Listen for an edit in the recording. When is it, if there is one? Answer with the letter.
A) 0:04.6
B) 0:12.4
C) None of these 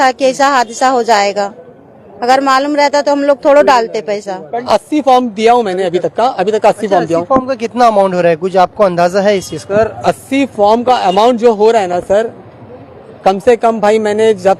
A